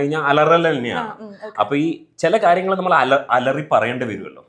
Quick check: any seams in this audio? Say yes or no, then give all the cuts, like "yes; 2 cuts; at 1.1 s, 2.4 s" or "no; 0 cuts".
no; 0 cuts